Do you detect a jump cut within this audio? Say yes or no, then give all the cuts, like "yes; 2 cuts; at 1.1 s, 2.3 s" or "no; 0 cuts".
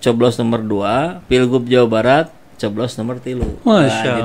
yes; 1 cut; at 1.2 s